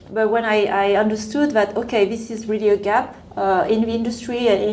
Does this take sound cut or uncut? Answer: uncut